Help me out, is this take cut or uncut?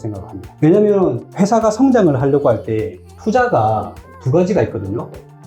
uncut